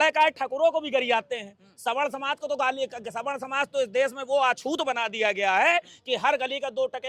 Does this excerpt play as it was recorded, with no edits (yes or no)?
yes